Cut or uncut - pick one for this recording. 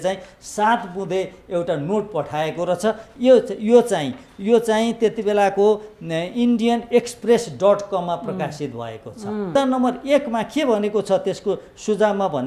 cut